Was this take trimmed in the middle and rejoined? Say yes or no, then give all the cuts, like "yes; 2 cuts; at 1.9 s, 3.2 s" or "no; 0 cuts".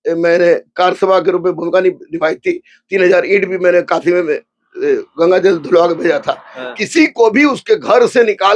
yes; 1 cut; at 6.7 s